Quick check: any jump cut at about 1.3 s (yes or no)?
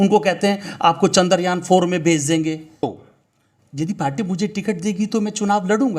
no